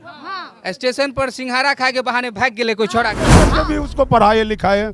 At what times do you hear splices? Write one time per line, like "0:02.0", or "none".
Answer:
0:03.4